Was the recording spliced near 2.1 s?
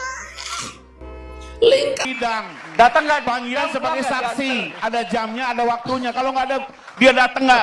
yes; 1 cut; at 2.1 s

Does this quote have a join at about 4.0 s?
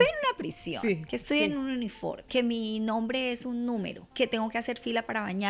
yes; 2 cuts; at 2.2 s, 4.0 s

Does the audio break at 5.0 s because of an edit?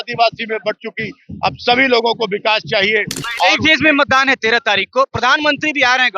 no; 1 cut; at 3.2 s

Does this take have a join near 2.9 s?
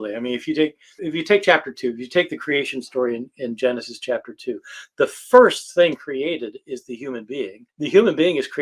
no; 2 cuts; at 1.0 s, 7.6 s

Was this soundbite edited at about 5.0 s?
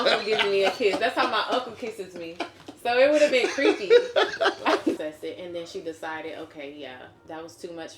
yes; 1 cut; at 5.0 s

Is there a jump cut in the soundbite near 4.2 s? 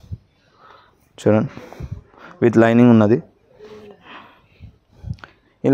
no; 0 cuts

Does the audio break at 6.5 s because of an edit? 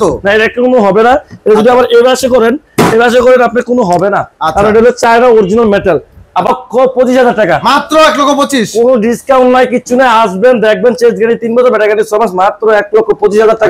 yes; 1 cut; at 6.5 s

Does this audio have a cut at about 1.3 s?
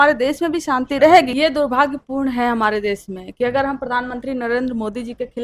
yes; 1 cut; at 1.3 s

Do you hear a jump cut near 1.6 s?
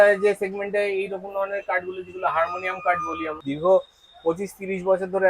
no; 1 cut; at 3.4 s

